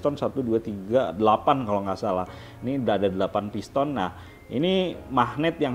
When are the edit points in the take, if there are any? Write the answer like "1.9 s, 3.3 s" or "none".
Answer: none